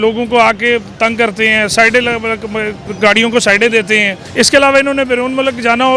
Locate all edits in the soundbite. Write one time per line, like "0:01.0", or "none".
0:02.8
0:04.2